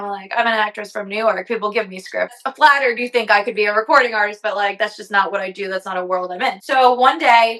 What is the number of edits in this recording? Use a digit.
2